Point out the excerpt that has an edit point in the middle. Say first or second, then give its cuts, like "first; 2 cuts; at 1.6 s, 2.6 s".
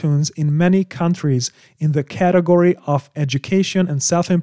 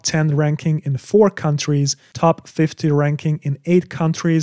second; 1 cut; at 2.0 s